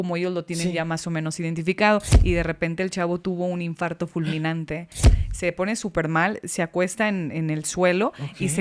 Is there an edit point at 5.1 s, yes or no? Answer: yes